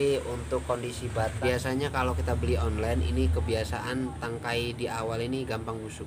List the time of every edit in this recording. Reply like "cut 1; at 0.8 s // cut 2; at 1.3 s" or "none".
cut 1; at 1.4 s